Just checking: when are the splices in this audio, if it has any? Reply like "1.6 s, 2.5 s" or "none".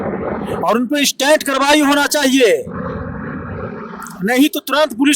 none